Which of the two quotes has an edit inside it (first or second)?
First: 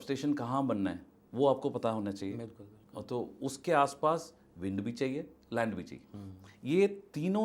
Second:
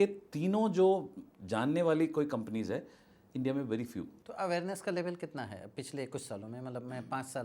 second